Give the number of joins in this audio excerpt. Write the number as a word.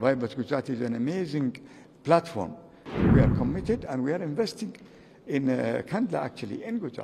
one